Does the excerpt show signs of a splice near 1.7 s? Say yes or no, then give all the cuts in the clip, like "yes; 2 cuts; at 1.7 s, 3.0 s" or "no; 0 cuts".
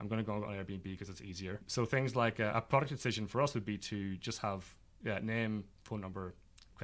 yes; 1 cut; at 1.7 s